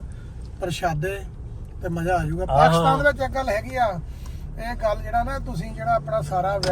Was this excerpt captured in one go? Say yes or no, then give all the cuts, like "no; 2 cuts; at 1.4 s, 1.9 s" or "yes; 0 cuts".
yes; 0 cuts